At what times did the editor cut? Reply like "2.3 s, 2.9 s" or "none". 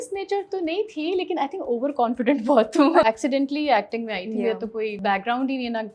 3.0 s, 5.0 s